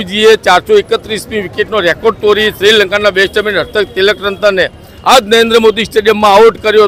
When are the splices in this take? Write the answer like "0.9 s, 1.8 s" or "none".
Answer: none